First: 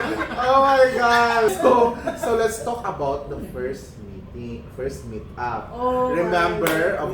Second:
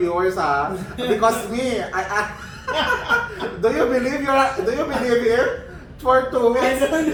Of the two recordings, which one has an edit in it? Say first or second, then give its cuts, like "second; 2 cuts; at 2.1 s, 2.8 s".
first; 1 cut; at 1.5 s